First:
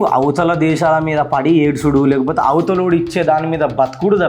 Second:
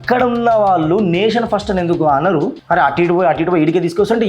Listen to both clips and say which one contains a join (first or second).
second